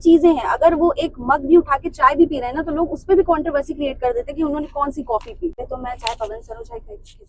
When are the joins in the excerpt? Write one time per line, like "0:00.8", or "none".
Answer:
0:05.7